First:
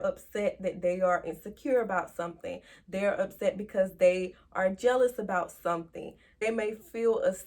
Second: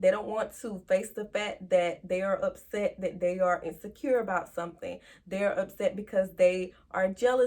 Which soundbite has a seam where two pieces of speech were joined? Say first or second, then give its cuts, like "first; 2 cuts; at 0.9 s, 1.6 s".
first; 1 cut; at 6.3 s